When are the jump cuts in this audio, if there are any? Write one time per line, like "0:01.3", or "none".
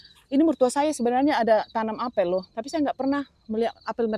none

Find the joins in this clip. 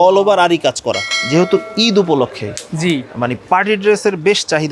0:01.1

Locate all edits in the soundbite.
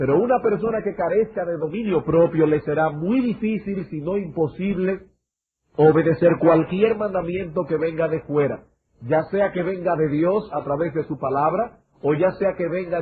none

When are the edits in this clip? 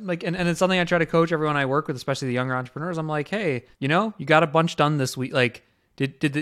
0:03.7

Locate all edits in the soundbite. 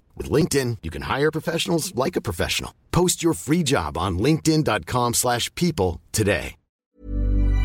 0:06.7

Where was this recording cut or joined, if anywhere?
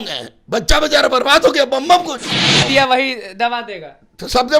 0:02.7

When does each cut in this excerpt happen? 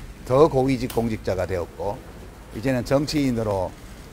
none

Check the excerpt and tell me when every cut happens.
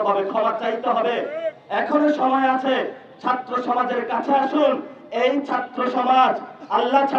none

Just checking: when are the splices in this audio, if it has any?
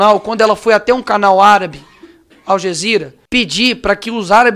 0:03.2

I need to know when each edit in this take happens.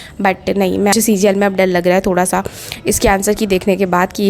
0:00.9

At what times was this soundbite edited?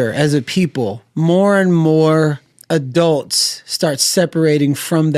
0:01.0
0:02.5

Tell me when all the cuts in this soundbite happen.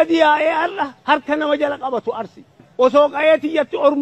0:02.6

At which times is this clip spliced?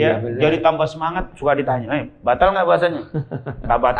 none

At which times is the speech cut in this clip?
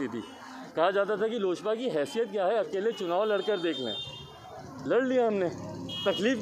none

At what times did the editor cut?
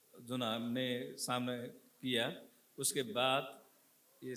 none

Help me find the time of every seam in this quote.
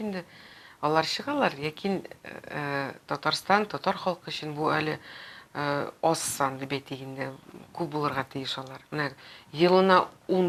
none

